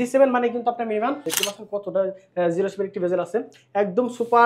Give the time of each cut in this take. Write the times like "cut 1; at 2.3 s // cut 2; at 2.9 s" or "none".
cut 1; at 1.3 s